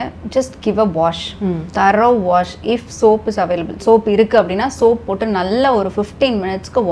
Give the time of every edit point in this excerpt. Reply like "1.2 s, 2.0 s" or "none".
none